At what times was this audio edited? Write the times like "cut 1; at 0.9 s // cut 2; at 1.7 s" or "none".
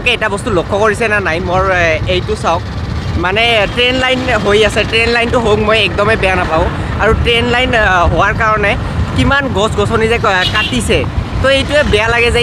none